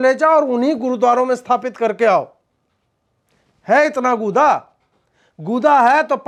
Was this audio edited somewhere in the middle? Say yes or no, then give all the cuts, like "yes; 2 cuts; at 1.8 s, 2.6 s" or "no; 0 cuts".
no; 0 cuts